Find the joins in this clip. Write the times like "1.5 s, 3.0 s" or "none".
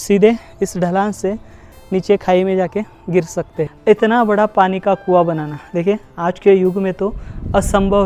3.6 s